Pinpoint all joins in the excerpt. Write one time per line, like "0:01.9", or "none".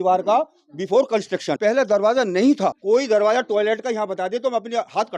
0:01.5
0:02.8